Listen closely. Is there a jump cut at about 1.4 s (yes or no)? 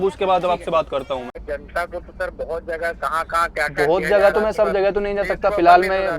yes